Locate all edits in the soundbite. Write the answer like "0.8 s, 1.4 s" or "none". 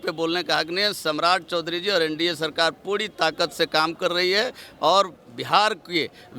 none